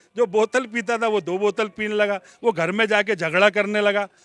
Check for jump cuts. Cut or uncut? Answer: uncut